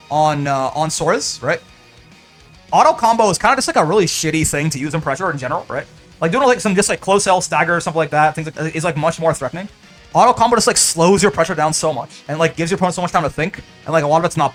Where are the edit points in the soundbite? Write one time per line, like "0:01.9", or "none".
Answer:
none